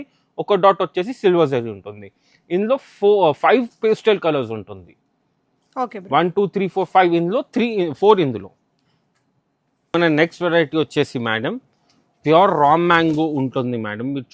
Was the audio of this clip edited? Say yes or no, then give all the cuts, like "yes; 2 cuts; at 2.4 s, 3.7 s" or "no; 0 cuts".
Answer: no; 0 cuts